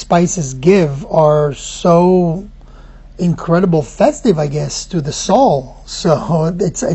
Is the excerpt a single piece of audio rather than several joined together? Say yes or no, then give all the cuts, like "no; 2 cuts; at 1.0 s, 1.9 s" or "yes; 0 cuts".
yes; 0 cuts